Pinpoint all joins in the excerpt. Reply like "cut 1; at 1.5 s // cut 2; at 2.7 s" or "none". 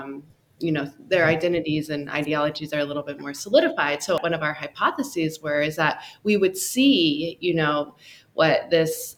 cut 1; at 4.2 s